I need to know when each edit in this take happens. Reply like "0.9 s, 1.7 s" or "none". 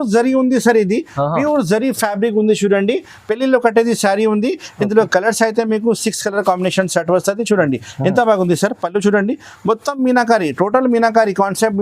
none